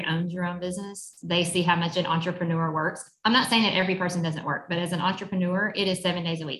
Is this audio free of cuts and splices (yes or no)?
yes